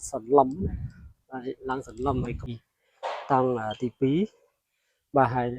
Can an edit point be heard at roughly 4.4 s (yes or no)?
no